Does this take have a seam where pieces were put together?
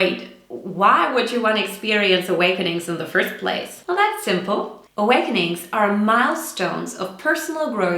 yes; 2 cuts; at 3.7 s, 4.8 s

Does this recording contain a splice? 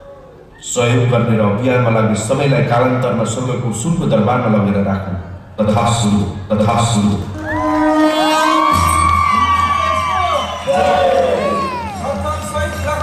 no; 0 cuts

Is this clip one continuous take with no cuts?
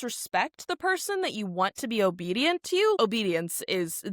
no; 1 cut; at 3.0 s

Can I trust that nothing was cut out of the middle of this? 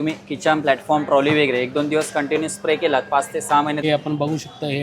no; 1 cut; at 3.8 s

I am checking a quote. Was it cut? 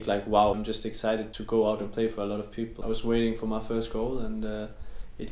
yes; 2 cuts; at 1.2 s, 2.7 s

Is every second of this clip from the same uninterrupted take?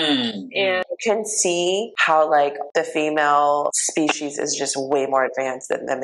no; 4 cuts; at 0.8 s, 1.9 s, 2.6 s, 3.8 s

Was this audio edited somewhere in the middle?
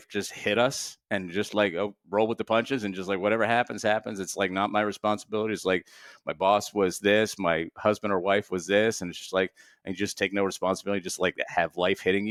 no; 0 cuts

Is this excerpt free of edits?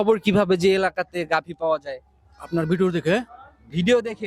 yes; 0 cuts

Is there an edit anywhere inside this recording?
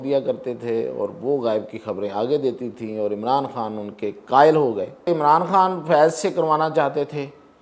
yes; 1 cut; at 5.1 s

